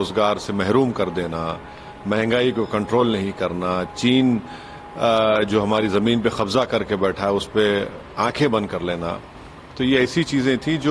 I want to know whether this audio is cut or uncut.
uncut